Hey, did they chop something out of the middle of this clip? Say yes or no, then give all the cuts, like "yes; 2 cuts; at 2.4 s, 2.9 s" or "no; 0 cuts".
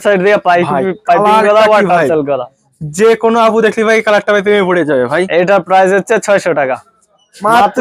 no; 0 cuts